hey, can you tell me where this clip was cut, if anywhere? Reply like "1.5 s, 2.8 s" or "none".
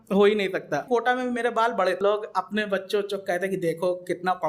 0.8 s, 2.0 s